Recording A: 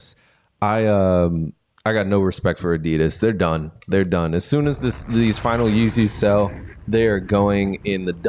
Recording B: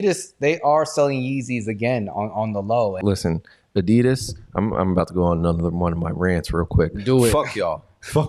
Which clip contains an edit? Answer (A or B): B